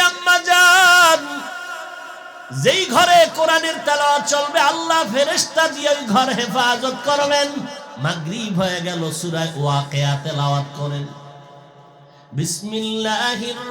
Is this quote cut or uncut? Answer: cut